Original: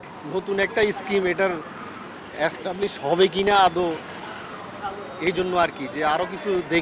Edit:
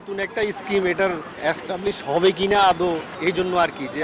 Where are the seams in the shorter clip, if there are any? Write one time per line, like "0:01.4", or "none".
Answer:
0:01.3
0:03.1